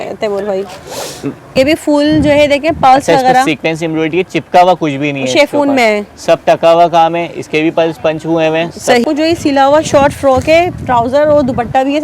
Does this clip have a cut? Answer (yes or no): yes